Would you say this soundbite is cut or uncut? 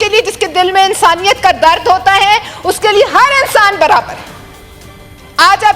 uncut